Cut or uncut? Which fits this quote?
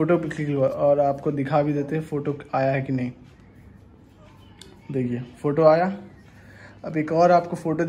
uncut